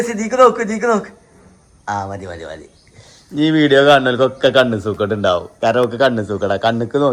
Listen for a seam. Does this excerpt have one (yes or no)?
no